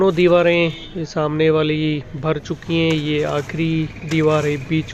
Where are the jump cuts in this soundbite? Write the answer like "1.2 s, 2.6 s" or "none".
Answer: none